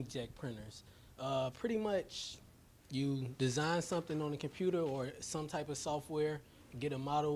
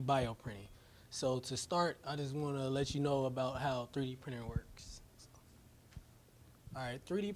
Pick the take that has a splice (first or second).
second